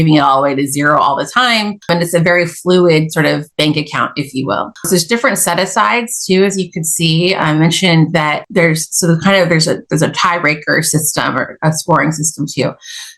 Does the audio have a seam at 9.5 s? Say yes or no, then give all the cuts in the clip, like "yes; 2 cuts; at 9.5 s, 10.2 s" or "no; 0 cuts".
no; 3 cuts; at 1.8 s, 3.5 s, 4.7 s